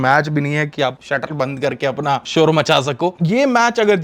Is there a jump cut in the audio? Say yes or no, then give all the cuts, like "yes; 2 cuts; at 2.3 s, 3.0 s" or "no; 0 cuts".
yes; 3 cuts; at 1.0 s, 2.3 s, 3.2 s